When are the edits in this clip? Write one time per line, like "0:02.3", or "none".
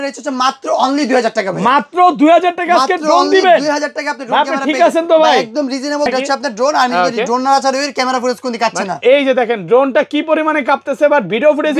0:06.1